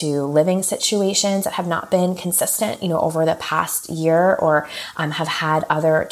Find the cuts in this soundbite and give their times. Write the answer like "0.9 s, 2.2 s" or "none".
none